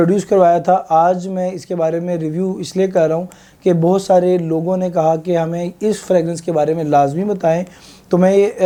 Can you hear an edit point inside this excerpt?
no; 0 cuts

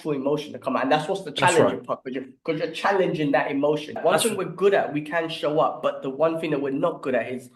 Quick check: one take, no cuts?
no; 1 cut; at 4.0 s

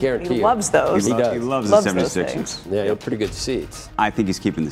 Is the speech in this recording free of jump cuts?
no; 1 cut; at 3.8 s

